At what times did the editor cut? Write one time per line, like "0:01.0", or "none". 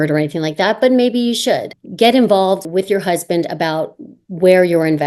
0:01.8
0:02.6